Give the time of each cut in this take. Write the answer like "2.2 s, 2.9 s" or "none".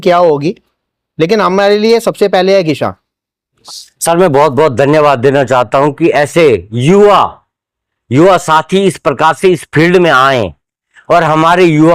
3.5 s